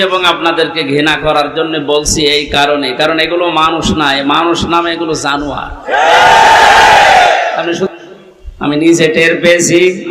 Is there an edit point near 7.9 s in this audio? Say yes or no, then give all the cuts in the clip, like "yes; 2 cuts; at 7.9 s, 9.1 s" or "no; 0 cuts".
yes; 1 cut; at 7.9 s